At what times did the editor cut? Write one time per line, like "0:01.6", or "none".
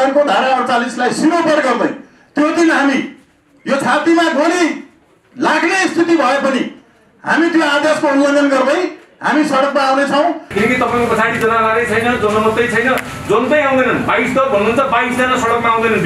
0:10.5